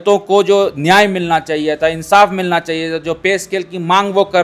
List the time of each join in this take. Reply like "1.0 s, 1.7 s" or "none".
none